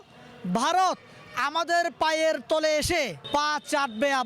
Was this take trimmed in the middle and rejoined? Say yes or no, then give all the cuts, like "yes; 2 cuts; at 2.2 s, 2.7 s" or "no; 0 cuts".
yes; 1 cut; at 3.2 s